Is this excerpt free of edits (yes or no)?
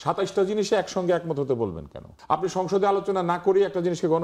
no